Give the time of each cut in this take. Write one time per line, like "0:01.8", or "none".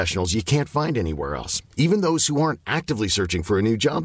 none